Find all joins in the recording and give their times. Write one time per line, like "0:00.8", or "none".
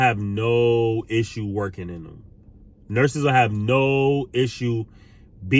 none